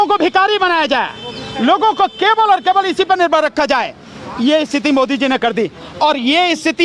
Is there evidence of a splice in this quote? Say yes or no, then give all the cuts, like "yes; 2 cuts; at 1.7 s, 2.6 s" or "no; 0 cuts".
no; 0 cuts